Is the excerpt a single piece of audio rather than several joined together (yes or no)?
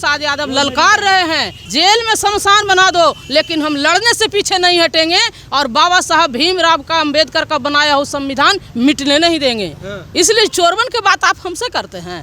no